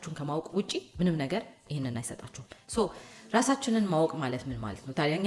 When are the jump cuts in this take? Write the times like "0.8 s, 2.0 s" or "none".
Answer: none